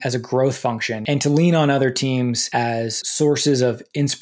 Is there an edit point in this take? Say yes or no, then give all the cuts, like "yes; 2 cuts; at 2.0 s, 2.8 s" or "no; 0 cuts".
yes; 2 cuts; at 0.9 s, 2.8 s